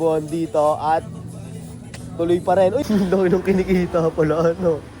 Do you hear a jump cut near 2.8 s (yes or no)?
yes